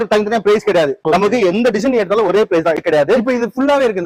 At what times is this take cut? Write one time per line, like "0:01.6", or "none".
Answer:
0:01.0
0:02.8

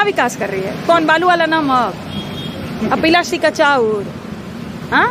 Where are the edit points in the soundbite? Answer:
none

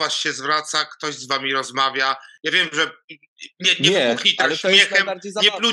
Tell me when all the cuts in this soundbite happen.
none

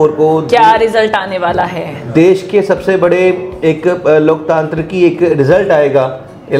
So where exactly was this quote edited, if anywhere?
none

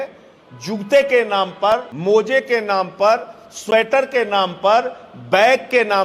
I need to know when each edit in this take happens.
0:01.9

